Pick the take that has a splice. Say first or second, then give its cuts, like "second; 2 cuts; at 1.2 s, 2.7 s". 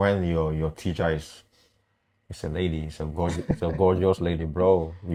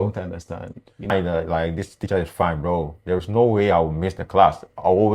second; 1 cut; at 1.1 s